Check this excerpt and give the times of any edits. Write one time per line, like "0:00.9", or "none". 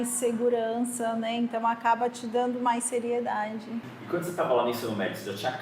0:03.9